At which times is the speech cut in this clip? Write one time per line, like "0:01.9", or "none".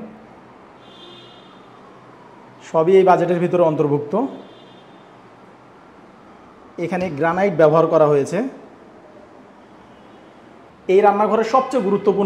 0:10.7